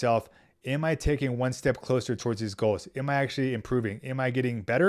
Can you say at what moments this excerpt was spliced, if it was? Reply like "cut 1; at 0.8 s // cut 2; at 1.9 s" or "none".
none